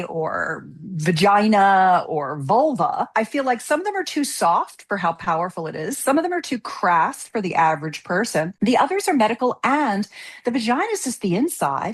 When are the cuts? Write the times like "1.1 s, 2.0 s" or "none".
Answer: 3.1 s, 8.5 s